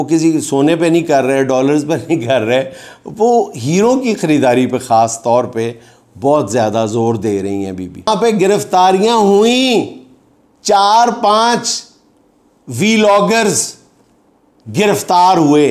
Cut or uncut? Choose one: cut